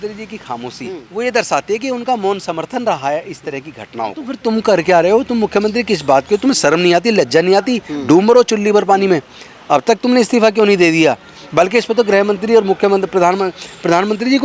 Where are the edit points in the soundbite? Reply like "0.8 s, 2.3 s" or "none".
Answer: 1.0 s, 4.3 s